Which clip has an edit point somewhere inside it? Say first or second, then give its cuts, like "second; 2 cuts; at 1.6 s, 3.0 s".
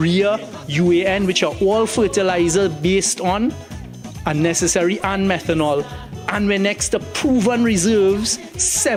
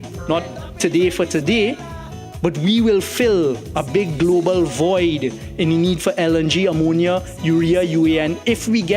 second; 1 cut; at 2.1 s